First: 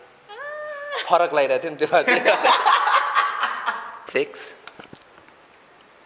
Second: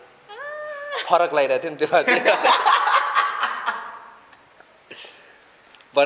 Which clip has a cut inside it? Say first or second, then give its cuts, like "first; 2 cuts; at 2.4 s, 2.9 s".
first; 1 cut; at 4.0 s